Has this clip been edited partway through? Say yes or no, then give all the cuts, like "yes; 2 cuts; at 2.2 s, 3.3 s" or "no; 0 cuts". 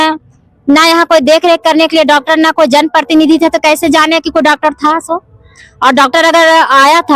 no; 0 cuts